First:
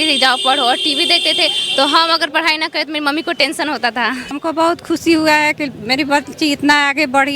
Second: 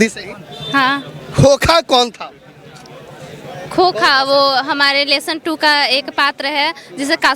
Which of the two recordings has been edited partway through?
first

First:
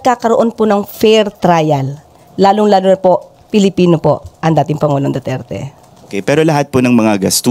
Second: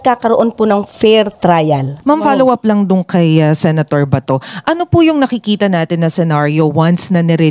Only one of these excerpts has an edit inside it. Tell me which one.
second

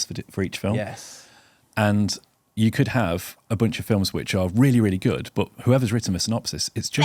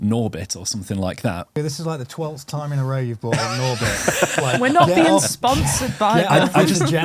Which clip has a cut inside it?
second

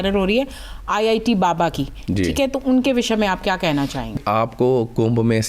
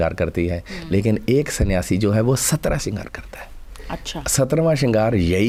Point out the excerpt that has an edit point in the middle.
first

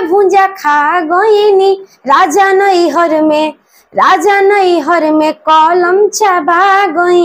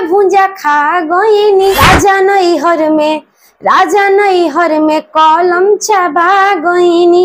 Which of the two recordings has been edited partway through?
second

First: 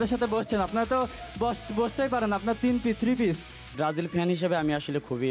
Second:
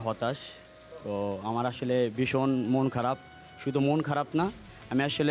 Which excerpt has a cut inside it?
first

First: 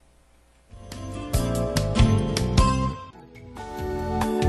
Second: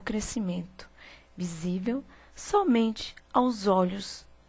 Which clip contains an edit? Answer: second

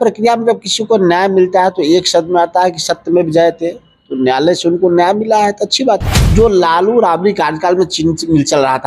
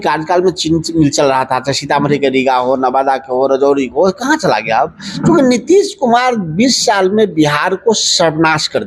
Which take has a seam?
first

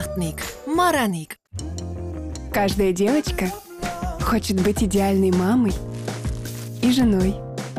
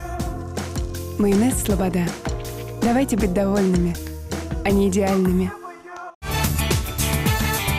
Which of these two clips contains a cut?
second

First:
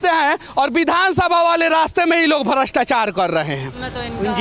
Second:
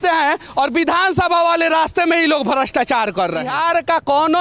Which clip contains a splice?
second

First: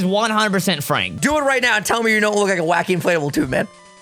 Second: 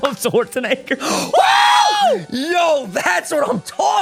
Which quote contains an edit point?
first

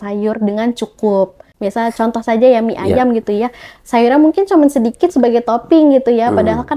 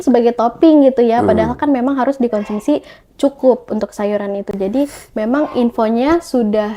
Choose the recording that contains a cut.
first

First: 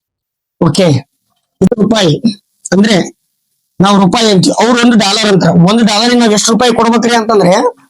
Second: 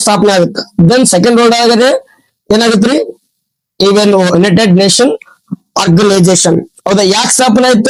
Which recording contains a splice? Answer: first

